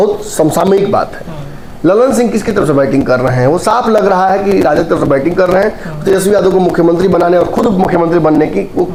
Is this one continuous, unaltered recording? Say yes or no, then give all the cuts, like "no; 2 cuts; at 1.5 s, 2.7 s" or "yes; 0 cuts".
yes; 0 cuts